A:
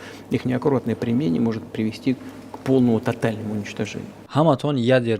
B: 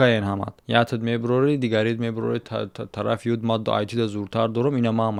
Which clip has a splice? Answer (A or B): A